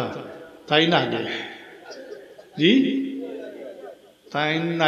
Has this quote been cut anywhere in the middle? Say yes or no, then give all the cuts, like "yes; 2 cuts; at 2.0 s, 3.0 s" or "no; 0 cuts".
no; 0 cuts